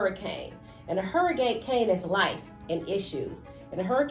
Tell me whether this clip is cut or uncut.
uncut